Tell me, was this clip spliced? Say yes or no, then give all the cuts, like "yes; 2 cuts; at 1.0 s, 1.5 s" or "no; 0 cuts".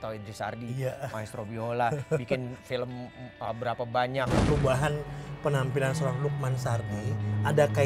yes; 1 cut; at 4.5 s